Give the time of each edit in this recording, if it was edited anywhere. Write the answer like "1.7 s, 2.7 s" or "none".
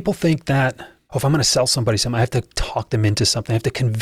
0.9 s